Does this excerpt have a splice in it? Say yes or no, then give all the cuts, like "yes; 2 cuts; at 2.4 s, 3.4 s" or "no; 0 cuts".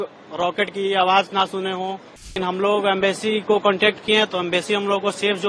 yes; 1 cut; at 2.4 s